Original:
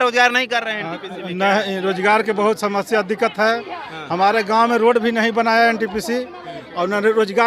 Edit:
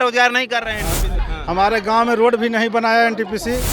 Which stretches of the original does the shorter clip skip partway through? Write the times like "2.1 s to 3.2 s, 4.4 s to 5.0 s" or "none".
1.2 s to 3.8 s